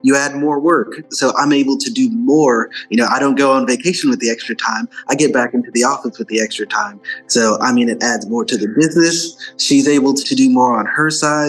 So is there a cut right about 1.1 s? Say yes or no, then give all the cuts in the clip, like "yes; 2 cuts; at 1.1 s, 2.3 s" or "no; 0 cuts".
yes; 2 cuts; at 1.1 s, 10.2 s